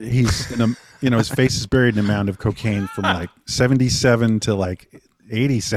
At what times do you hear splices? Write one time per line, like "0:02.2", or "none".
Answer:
none